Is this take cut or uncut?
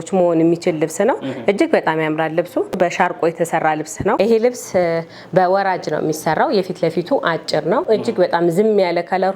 cut